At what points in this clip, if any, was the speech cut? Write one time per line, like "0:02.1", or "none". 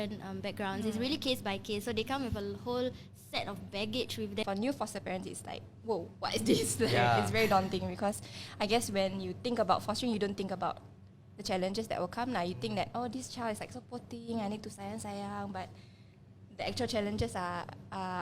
0:04.4